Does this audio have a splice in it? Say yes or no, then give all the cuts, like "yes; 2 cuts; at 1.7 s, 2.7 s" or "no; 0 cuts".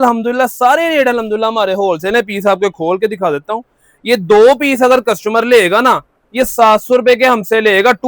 no; 0 cuts